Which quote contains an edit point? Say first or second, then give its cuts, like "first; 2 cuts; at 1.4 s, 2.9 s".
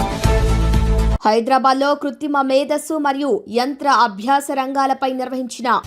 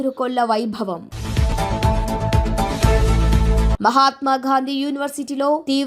first; 1 cut; at 1.1 s